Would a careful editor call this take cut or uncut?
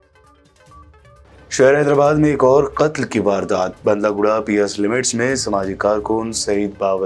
uncut